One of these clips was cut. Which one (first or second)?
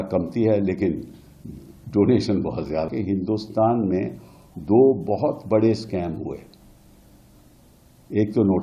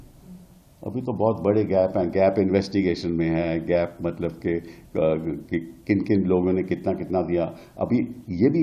first